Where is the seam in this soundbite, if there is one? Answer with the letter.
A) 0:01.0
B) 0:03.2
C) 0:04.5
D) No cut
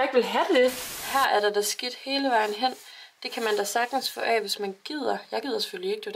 A